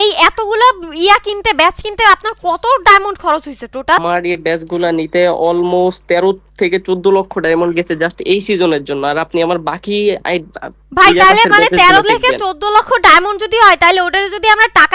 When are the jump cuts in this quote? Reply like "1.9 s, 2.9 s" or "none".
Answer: 4.0 s